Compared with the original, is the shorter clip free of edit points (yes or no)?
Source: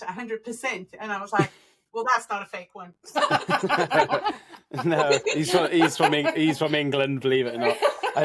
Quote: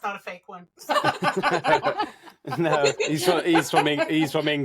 yes